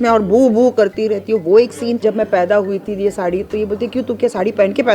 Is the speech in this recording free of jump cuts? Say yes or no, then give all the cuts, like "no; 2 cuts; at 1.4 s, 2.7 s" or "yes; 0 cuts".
no; 1 cut; at 2.0 s